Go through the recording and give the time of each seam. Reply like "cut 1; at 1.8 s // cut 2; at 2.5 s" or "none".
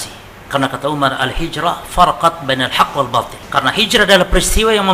cut 1; at 3.4 s